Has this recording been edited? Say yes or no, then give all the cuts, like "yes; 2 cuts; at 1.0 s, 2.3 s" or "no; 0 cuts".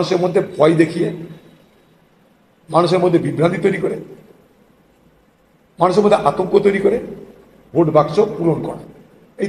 no; 0 cuts